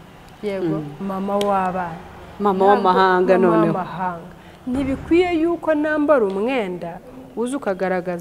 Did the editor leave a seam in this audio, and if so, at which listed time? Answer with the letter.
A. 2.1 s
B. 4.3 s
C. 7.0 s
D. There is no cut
D